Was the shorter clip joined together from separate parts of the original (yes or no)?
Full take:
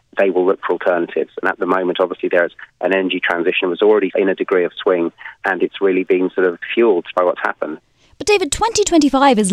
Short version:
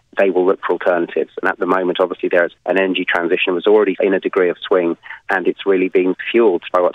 yes